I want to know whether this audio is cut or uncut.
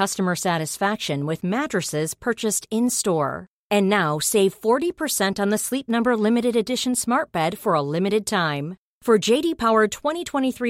uncut